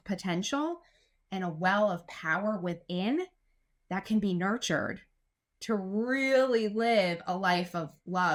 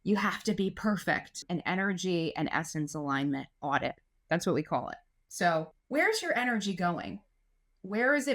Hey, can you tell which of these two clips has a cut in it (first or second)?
second